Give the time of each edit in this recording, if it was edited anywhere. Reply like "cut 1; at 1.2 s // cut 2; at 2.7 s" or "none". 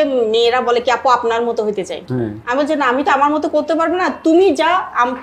none